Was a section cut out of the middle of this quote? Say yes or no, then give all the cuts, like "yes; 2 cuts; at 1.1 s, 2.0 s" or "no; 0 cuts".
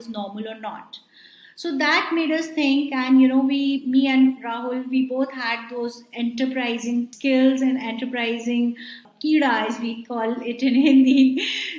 yes; 2 cuts; at 7.1 s, 9.0 s